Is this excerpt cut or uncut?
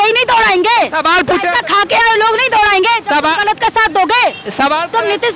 uncut